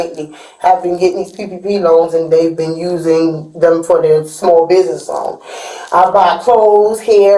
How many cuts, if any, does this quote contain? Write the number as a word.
zero